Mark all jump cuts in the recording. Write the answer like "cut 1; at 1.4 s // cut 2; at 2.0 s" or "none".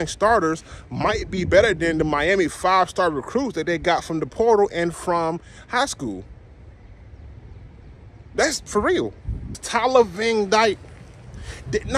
cut 1; at 9.6 s